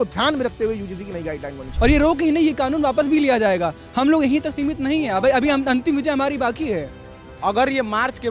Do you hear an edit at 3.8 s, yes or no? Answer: no